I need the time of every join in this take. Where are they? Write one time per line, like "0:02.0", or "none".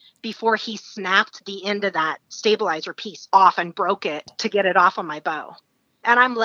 0:04.2